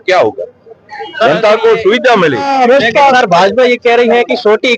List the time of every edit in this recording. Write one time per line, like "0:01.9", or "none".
0:02.5